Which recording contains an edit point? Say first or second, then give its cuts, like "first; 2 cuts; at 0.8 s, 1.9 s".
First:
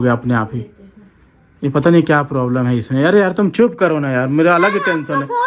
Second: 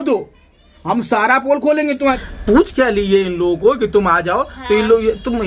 second; 1 cut; at 2.2 s